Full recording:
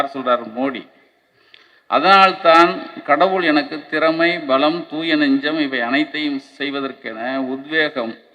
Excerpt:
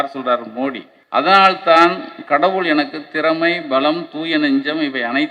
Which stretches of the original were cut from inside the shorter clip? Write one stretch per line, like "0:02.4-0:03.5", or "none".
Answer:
0:00.9-0:01.7